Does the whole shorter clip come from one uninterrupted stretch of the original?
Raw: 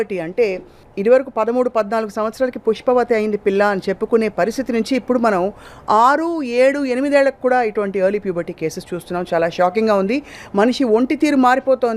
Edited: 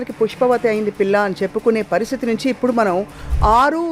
yes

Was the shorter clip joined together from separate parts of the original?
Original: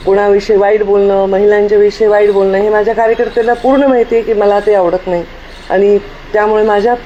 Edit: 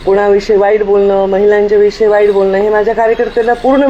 no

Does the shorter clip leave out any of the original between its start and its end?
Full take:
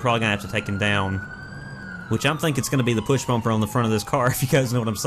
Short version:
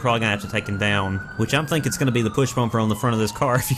yes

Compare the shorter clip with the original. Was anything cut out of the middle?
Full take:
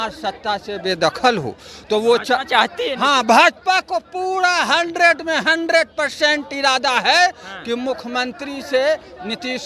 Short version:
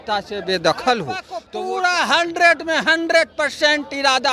yes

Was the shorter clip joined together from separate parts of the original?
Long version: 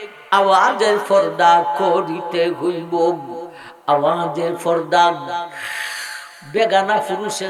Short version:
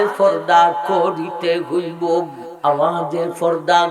yes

